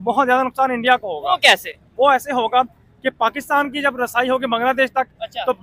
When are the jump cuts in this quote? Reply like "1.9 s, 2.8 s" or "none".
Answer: none